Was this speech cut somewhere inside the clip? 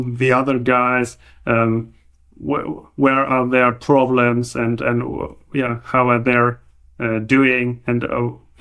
no; 0 cuts

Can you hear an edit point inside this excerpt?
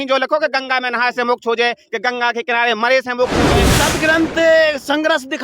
yes; 1 cut; at 3.7 s

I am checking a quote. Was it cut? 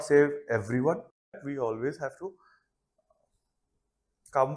yes; 1 cut; at 1.4 s

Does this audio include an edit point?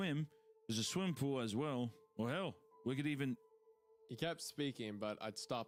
no; 0 cuts

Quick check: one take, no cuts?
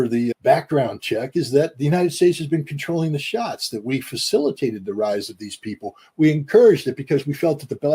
yes; 0 cuts

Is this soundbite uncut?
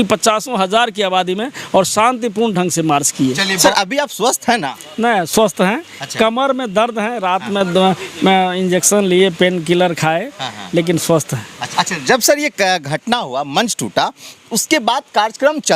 no; 2 cuts; at 3.6 s, 11.6 s

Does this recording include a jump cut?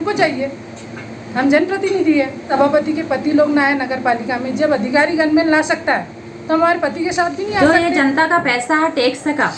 yes; 2 cuts; at 2.4 s, 7.6 s

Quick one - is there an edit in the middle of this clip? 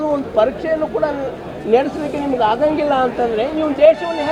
no; 0 cuts

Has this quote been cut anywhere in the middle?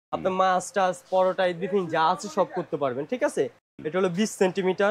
no; 0 cuts

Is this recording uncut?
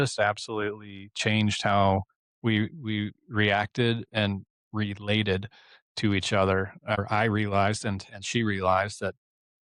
no; 1 cut; at 7.0 s

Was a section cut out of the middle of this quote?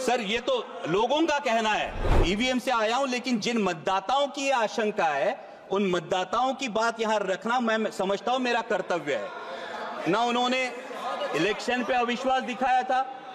yes; 1 cut; at 2.1 s

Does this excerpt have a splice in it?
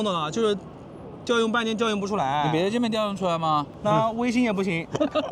yes; 1 cut; at 3.7 s

